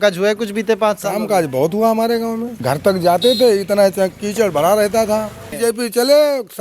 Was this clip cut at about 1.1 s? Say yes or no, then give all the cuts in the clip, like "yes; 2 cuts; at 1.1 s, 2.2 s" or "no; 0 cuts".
no; 2 cuts; at 2.5 s, 5.5 s